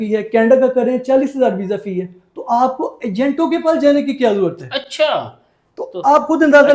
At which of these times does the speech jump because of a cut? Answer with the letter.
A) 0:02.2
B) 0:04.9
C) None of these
C